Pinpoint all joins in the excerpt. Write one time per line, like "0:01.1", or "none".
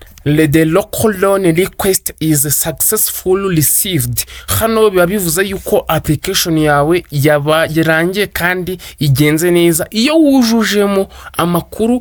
none